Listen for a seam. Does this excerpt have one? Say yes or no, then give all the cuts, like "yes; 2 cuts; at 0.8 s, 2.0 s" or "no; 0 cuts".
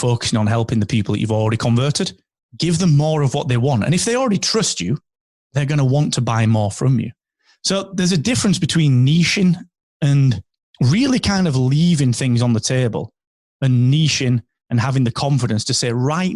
yes; 1 cut; at 2.2 s